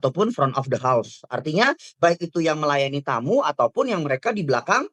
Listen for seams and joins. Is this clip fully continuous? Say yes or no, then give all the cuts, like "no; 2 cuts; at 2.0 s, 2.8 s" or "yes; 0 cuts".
yes; 0 cuts